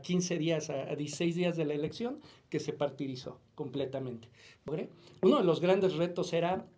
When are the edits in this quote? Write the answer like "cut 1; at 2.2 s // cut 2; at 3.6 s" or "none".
cut 1; at 4.7 s

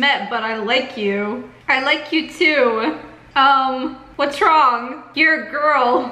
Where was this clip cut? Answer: cut 1; at 1.5 s // cut 2; at 3.2 s // cut 3; at 4.0 s

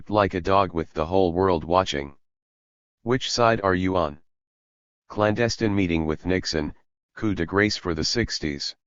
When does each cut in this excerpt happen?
none

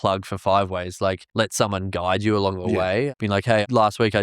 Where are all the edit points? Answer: cut 1; at 3.1 s

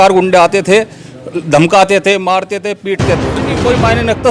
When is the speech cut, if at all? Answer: cut 1; at 3.2 s

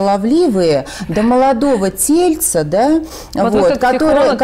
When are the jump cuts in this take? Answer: none

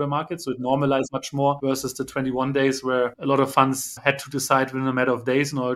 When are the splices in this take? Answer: cut 1; at 1.2 s // cut 2; at 3.2 s // cut 3; at 4.0 s

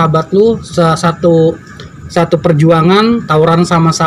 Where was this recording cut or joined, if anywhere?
none

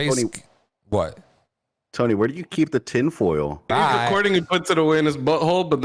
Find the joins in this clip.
cut 1; at 3.7 s

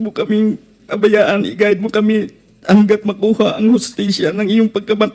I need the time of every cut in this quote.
none

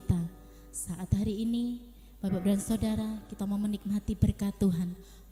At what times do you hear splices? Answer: none

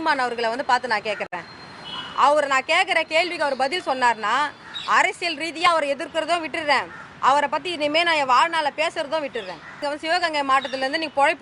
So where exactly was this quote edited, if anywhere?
cut 1; at 9.7 s

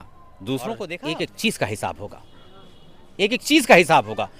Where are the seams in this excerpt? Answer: cut 1; at 1.0 s

